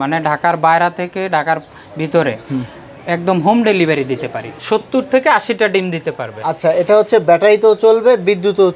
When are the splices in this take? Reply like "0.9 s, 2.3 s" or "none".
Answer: 4.5 s